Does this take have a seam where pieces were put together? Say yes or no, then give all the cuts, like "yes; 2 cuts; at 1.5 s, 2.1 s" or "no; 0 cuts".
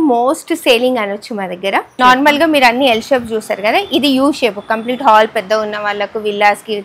yes; 1 cut; at 1.9 s